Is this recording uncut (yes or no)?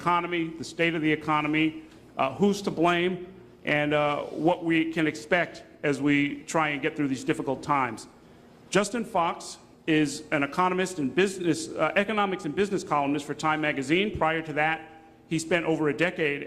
no